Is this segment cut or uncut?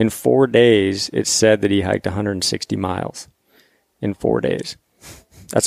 uncut